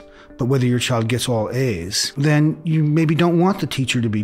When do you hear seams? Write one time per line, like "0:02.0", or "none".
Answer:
0:02.2